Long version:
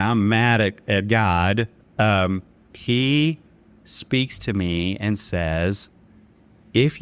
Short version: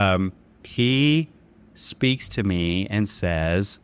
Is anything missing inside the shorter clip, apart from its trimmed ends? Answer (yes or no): no